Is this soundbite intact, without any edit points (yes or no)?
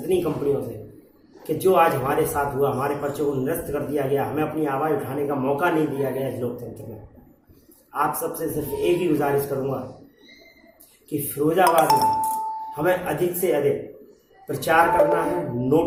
yes